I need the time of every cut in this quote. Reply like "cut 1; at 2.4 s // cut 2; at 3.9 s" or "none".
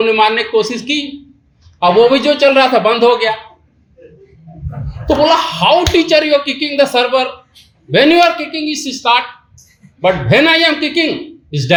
none